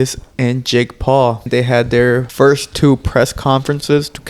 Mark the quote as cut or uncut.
cut